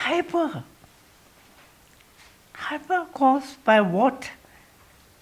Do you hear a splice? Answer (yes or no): no